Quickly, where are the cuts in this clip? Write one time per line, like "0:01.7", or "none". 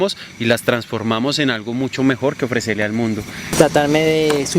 0:03.5